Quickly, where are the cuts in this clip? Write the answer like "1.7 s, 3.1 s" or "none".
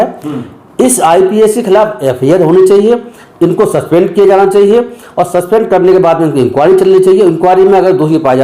none